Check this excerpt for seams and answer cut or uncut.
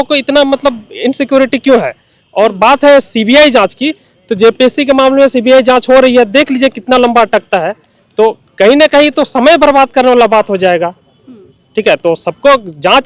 uncut